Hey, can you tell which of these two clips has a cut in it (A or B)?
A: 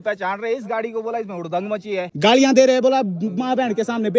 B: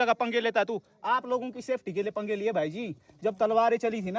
A